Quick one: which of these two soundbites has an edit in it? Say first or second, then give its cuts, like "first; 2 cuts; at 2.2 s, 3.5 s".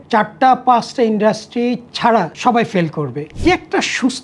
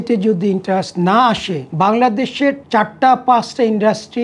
first; 1 cut; at 3.2 s